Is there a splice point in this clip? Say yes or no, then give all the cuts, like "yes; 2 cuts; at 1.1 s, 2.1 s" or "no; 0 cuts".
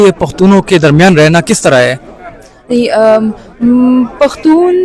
no; 0 cuts